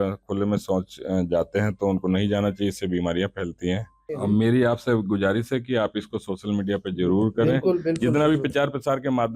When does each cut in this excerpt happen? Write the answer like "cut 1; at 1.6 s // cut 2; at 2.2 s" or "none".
cut 1; at 4.1 s